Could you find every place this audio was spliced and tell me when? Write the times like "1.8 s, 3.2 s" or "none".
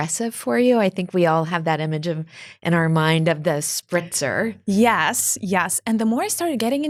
none